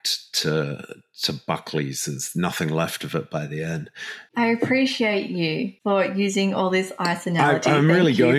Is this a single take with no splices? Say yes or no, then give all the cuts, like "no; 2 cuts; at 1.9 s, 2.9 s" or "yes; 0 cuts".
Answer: no; 2 cuts; at 4.2 s, 5.7 s